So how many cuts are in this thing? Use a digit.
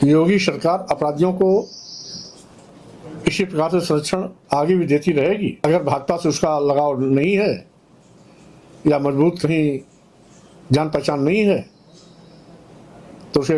1